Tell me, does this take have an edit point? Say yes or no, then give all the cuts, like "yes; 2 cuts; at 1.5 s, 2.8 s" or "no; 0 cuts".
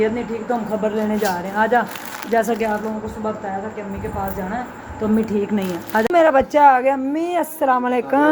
yes; 1 cut; at 6.1 s